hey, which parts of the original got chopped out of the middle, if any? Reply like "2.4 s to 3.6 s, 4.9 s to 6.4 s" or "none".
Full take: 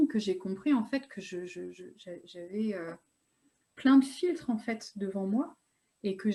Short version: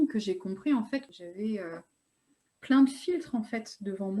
1.1 s to 2.3 s